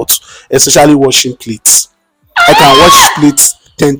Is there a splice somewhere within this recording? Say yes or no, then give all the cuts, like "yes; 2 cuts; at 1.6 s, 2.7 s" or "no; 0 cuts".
no; 0 cuts